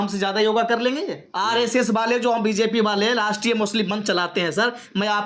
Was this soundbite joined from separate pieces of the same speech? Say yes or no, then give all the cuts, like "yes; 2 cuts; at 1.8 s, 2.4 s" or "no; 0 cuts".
yes; 1 cut; at 1.2 s